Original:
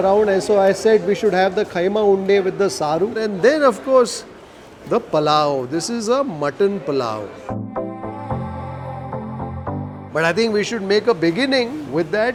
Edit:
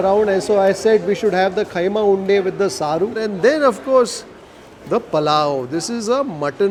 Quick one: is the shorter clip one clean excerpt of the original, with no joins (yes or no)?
yes